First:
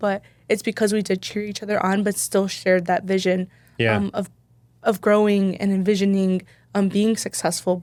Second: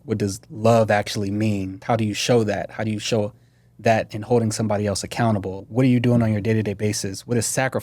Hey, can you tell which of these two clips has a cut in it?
second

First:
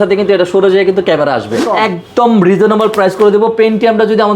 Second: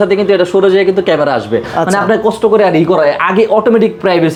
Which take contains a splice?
first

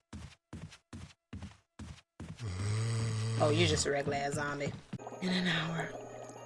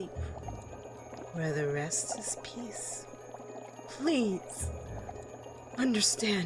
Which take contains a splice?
first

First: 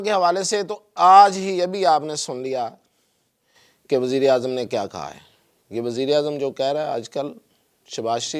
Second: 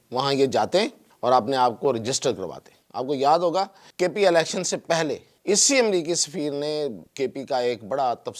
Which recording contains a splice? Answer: second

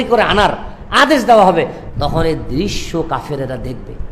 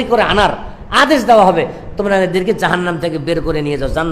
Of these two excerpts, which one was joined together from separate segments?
first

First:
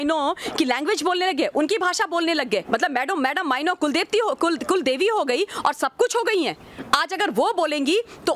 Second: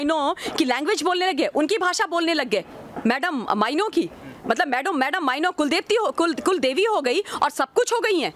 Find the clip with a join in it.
first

